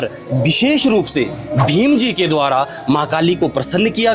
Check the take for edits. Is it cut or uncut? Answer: uncut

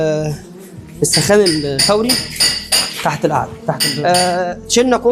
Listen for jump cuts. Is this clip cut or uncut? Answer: cut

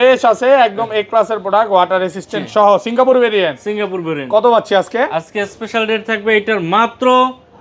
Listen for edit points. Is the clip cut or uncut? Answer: uncut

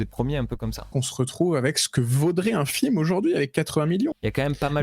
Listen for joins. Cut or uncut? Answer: cut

